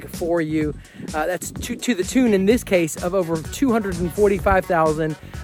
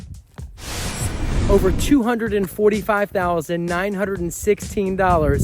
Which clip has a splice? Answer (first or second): second